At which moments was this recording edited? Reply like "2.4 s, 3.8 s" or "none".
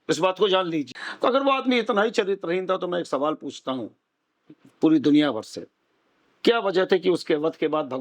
1.0 s

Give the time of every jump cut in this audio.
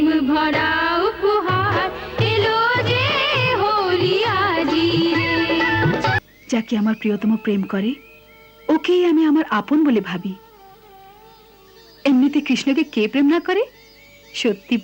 6.2 s

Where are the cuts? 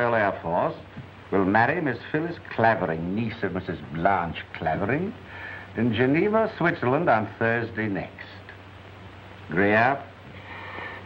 none

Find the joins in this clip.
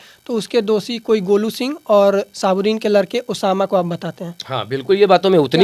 none

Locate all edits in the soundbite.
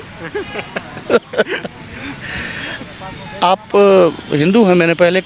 2.8 s

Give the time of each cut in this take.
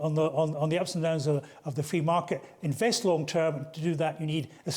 none

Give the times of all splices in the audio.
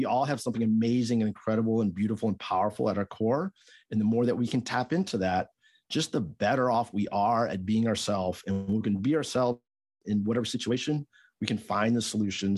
none

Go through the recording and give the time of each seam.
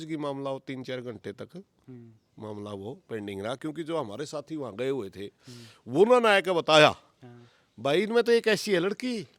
none

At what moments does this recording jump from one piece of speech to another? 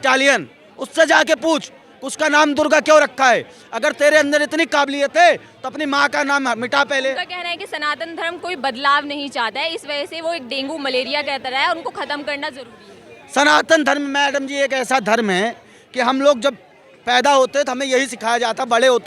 none

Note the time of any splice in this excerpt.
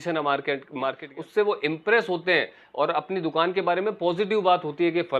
1.0 s

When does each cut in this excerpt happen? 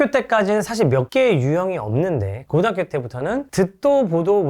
2.4 s

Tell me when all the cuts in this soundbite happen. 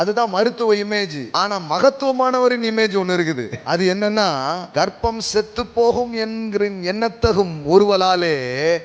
1.2 s, 3.5 s, 4.6 s

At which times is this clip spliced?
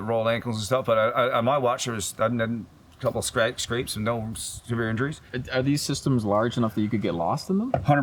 5.3 s

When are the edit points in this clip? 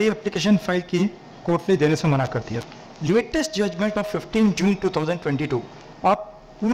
none

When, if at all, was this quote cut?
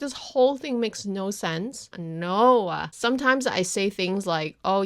2.0 s, 2.9 s

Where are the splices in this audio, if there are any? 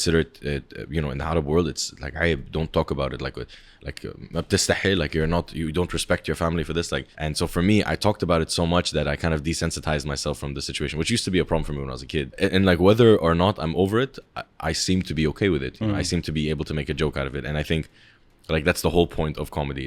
7.1 s, 12.3 s

